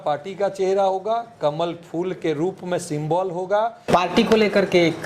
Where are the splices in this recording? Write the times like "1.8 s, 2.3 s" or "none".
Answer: 3.8 s

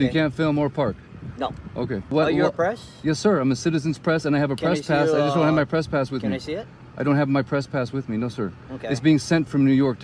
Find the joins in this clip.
2.1 s

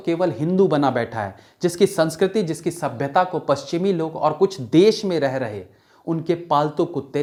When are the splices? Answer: none

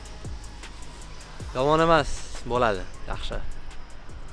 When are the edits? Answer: none

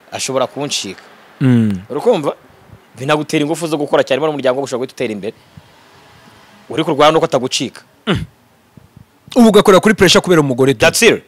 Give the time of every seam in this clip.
none

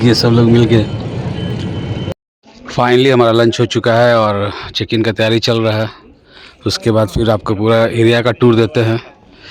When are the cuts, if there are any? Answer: 2.1 s

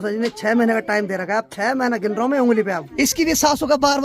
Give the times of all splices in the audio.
2.9 s

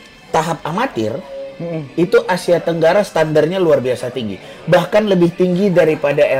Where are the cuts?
none

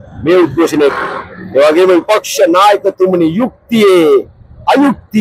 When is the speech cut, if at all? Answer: 1.0 s

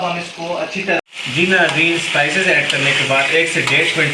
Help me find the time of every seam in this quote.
1.0 s

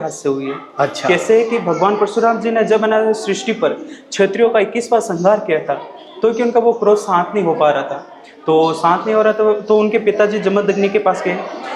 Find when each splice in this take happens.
none

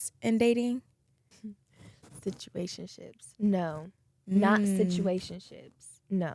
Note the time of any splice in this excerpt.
none

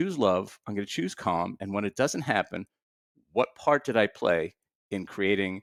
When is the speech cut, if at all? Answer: none

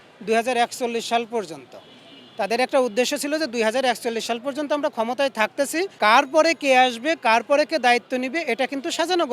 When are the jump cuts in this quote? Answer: none

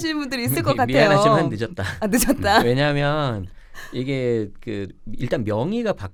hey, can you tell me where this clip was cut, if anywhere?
none

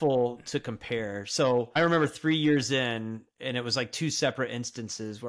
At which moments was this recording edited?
1.8 s

